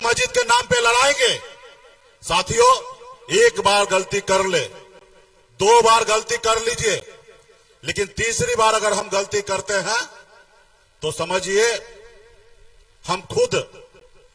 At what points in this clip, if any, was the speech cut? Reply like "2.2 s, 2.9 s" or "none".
none